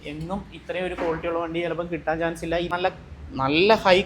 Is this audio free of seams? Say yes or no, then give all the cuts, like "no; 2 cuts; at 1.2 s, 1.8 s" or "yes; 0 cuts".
no; 1 cut; at 2.7 s